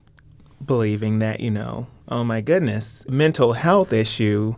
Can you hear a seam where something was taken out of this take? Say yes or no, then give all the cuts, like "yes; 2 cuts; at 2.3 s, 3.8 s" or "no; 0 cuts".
yes; 1 cut; at 3.1 s